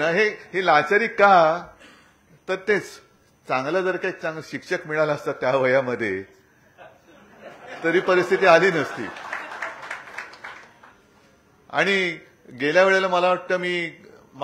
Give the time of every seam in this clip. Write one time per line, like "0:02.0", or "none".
none